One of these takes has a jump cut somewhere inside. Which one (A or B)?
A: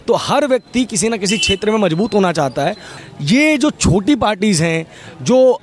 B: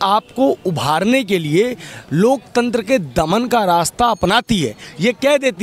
A